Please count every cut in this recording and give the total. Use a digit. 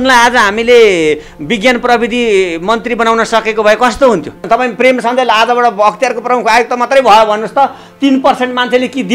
1